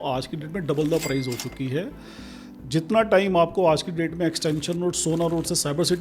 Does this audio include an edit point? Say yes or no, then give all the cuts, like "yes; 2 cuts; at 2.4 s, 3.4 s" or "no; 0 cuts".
yes; 1 cut; at 2.4 s